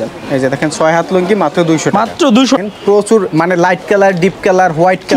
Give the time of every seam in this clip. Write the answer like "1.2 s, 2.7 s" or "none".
2.6 s